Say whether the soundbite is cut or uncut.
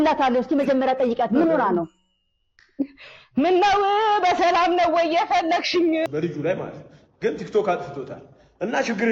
cut